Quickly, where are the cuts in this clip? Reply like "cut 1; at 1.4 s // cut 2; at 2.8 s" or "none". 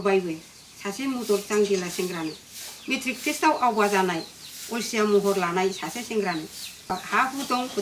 cut 1; at 6.9 s